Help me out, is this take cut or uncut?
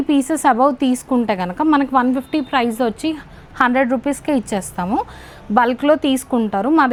uncut